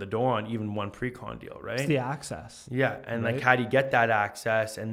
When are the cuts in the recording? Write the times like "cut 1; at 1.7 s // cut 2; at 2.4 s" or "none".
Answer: none